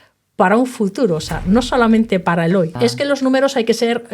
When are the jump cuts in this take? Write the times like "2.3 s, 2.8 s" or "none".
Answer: 2.7 s